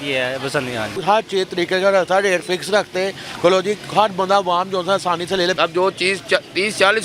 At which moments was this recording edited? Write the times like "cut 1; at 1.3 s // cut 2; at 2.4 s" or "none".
cut 1; at 0.9 s // cut 2; at 5.5 s